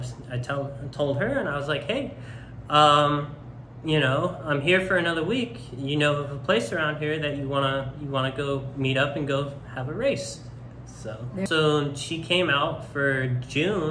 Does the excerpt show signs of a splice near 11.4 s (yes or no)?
yes